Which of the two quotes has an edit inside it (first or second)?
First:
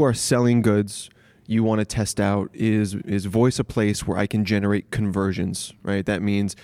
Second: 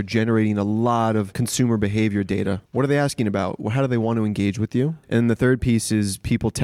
second